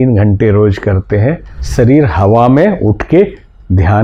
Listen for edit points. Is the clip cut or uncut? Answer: cut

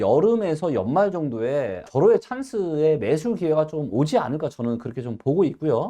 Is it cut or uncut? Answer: uncut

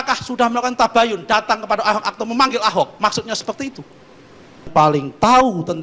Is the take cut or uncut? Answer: cut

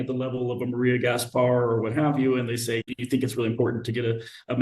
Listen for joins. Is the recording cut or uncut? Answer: cut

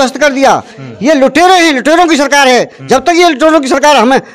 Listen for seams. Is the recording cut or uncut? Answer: uncut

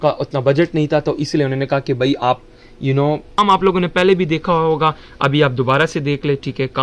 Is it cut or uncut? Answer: cut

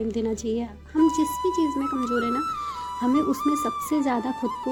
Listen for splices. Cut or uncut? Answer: uncut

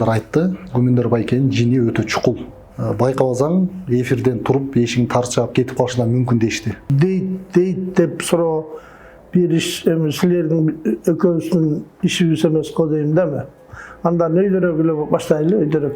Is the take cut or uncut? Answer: cut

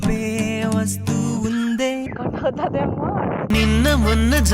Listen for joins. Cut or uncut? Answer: cut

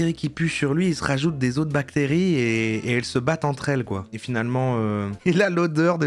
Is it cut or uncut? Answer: cut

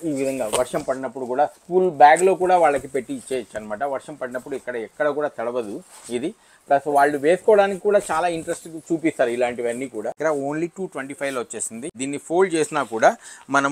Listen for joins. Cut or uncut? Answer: cut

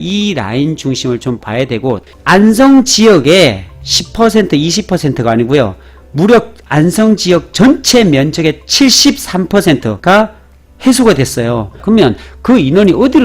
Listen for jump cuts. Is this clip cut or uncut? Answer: cut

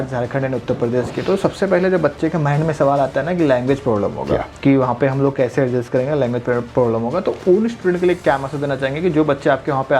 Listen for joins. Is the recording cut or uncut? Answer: cut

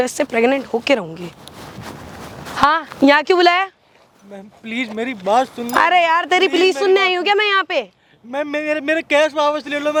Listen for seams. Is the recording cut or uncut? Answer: uncut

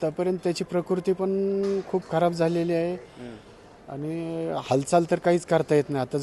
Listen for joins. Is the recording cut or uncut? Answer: uncut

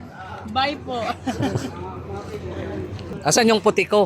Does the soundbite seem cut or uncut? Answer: cut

